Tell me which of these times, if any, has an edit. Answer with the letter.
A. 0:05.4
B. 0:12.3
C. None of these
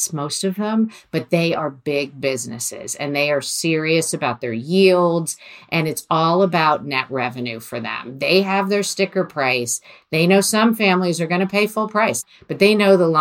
B